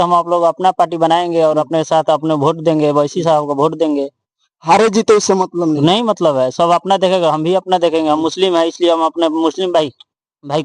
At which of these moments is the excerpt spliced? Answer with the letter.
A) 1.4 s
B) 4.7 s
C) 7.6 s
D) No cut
D